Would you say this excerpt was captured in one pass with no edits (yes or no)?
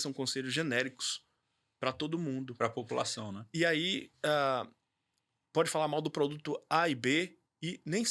yes